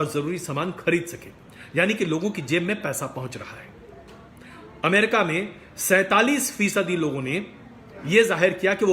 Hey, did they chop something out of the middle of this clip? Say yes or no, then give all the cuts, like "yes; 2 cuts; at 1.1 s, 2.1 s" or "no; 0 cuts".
no; 0 cuts